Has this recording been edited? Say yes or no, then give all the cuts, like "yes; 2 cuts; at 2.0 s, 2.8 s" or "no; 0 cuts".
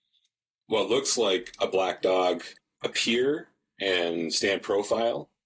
yes; 1 cut; at 2.5 s